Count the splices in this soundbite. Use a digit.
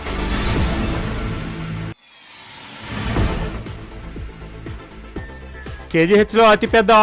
0